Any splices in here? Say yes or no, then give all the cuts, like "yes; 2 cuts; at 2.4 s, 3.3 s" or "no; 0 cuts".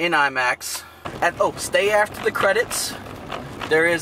yes; 1 cut; at 0.9 s